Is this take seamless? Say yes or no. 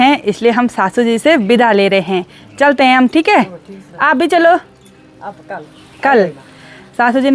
yes